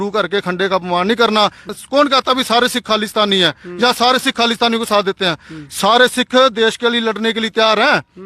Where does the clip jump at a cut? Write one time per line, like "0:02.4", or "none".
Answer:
0:01.6